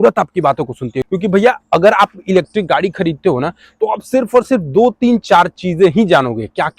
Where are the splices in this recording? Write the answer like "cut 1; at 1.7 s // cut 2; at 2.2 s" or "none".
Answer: cut 1; at 1.0 s

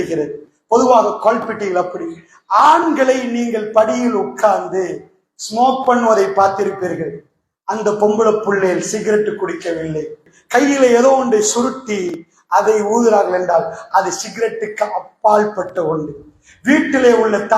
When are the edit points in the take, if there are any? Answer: cut 1; at 10.3 s

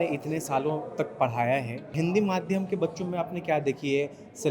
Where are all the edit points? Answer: cut 1; at 1.9 s

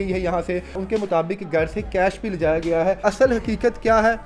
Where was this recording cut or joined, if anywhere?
cut 1; at 0.8 s // cut 2; at 3.0 s

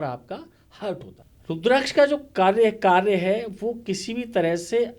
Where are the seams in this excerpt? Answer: cut 1; at 1.2 s

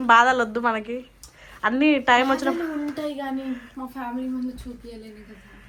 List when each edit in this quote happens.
none

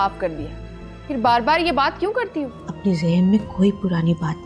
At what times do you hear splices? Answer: cut 1; at 2.6 s

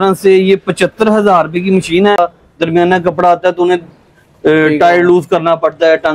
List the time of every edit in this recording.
cut 1; at 2.2 s

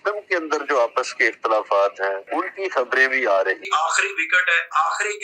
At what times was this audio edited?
cut 1; at 2.2 s // cut 2; at 3.6 s

